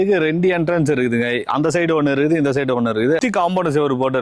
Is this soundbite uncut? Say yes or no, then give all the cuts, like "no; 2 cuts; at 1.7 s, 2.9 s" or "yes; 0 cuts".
no; 1 cut; at 3.2 s